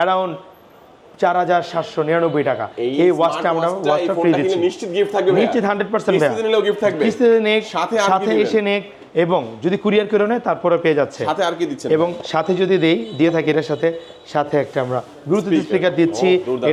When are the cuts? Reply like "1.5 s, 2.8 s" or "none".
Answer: none

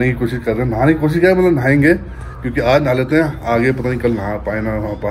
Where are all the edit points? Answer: none

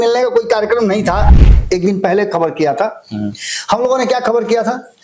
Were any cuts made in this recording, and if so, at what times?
1.3 s

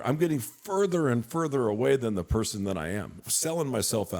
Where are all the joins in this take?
3.2 s

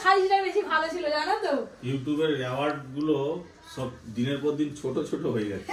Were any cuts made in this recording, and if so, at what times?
none

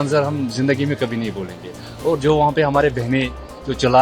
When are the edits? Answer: none

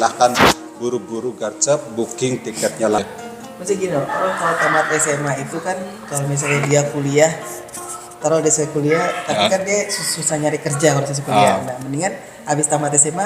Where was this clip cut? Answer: 3.0 s

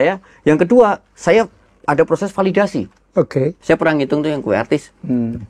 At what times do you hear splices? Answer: 3.6 s

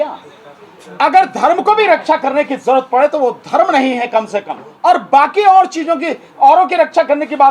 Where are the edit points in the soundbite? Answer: 4.6 s

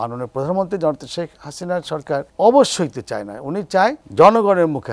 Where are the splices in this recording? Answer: 2.3 s, 4.0 s

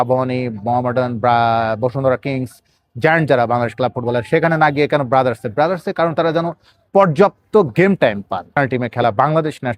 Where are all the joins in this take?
8.5 s

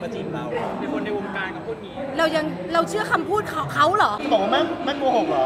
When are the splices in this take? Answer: 4.2 s

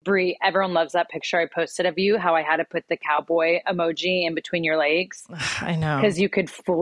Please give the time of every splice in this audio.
none

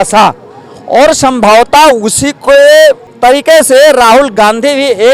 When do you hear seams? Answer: 3.1 s

